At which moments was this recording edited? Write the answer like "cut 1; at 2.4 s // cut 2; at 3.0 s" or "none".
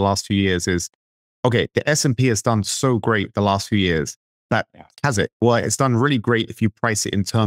none